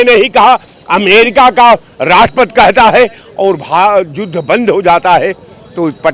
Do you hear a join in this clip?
no; 0 cuts

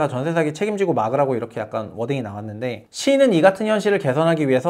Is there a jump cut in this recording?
no; 0 cuts

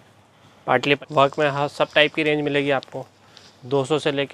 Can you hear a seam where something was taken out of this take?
yes; 1 cut; at 1.0 s

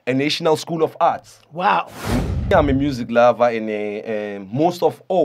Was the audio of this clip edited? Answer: yes; 1 cut; at 2.4 s

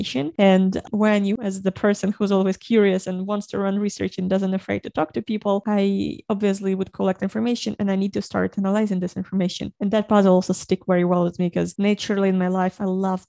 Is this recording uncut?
yes; 0 cuts

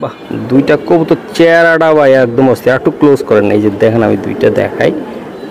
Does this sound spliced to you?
no; 0 cuts

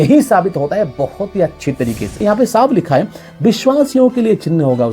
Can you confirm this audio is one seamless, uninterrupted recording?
no; 1 cut; at 2.2 s

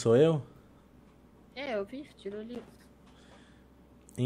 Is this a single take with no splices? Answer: yes; 0 cuts

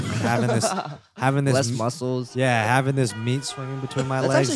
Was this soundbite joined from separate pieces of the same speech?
no; 0 cuts

